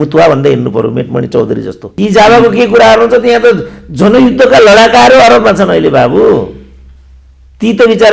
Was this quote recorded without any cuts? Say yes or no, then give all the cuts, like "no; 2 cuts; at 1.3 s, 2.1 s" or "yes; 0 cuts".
no; 1 cut; at 1.9 s